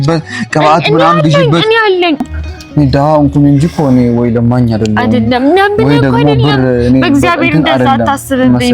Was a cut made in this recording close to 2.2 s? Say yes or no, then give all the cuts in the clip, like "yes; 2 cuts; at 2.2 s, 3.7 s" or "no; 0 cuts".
yes; 1 cut; at 2.2 s